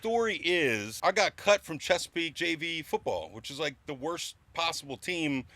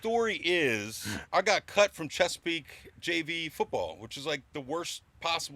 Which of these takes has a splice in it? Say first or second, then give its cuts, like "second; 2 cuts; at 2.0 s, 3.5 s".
first; 2 cuts; at 0.9 s, 2.3 s